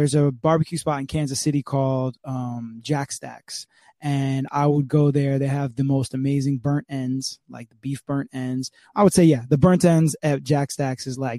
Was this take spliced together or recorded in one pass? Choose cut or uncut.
cut